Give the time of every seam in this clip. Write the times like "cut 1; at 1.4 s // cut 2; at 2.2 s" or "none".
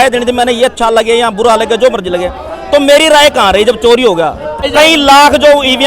cut 1; at 4.6 s